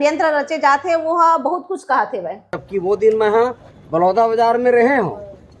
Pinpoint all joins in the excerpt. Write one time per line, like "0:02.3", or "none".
0:02.6